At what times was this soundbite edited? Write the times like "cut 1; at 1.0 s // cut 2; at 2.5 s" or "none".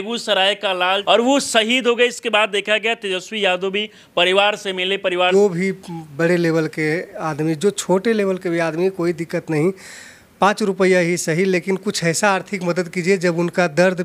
cut 1; at 1.0 s // cut 2; at 5.3 s